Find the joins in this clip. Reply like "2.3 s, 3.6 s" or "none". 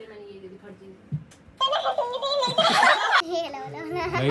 3.2 s

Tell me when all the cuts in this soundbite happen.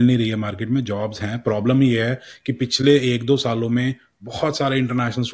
none

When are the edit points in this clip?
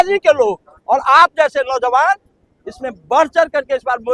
none

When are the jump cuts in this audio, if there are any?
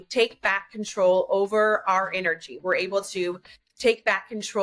none

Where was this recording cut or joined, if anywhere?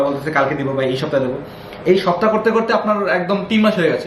none

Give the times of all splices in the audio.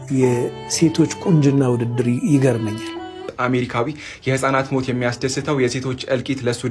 3.3 s

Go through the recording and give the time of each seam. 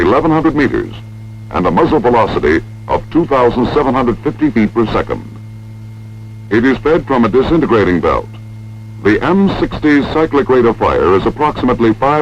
10.3 s

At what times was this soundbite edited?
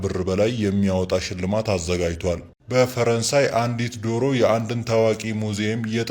2.5 s

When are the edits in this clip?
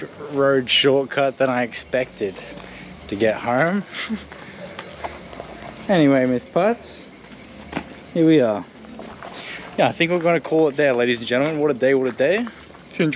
none

